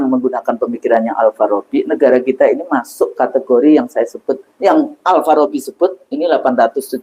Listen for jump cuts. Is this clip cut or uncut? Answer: uncut